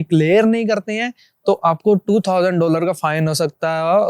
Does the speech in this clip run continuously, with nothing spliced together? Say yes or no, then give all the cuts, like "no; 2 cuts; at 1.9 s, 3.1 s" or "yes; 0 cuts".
yes; 0 cuts